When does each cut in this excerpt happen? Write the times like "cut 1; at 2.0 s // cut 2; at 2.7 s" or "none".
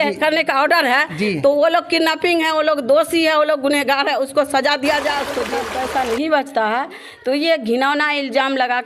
cut 1; at 5.6 s